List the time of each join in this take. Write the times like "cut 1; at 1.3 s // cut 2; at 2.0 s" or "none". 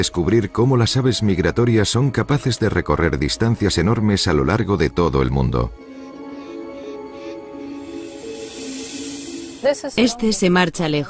none